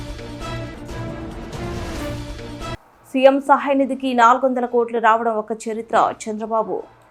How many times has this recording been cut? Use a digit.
0